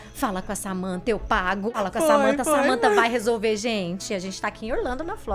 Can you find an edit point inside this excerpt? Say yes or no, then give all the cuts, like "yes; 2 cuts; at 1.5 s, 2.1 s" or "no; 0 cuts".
yes; 1 cut; at 1.6 s